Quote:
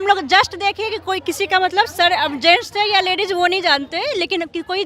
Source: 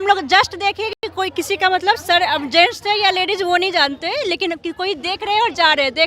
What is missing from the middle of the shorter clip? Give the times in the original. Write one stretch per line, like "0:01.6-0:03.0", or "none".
0:00.9-0:01.0